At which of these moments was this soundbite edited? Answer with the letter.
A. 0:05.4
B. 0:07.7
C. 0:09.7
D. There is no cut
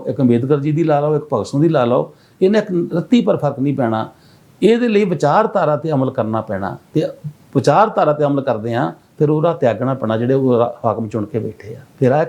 D